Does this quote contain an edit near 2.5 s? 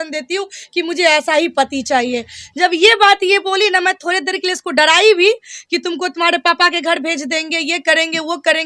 no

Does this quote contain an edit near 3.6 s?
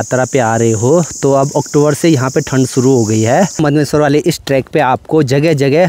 yes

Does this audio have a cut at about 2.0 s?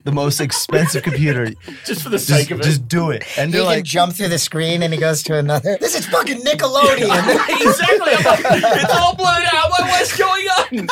no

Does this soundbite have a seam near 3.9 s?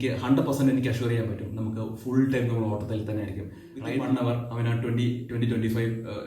yes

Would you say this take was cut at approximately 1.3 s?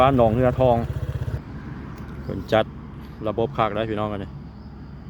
yes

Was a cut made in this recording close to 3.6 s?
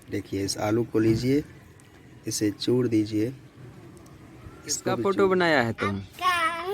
no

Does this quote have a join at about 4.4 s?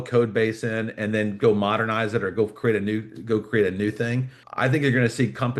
yes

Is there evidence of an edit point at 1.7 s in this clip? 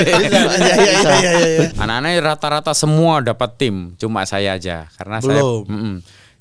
yes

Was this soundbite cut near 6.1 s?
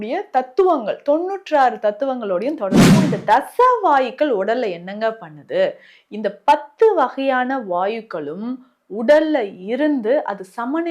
no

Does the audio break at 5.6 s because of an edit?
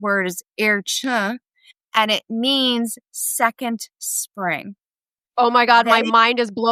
no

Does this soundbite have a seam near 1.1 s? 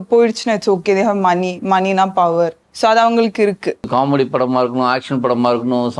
no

